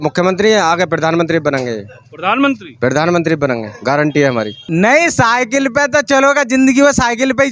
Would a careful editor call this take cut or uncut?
cut